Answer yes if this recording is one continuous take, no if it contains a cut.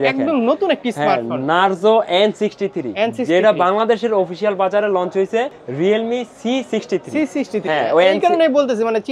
yes